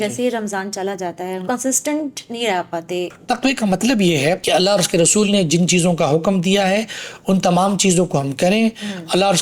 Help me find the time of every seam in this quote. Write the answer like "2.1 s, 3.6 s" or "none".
1.4 s, 3.2 s, 4.4 s